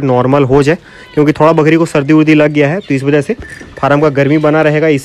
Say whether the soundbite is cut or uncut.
uncut